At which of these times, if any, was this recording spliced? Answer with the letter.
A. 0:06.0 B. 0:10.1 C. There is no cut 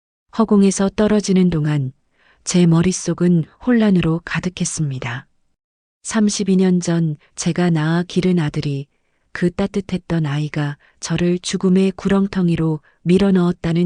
C